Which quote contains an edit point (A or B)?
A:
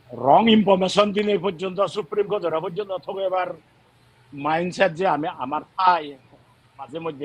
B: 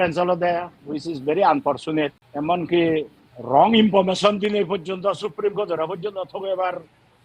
B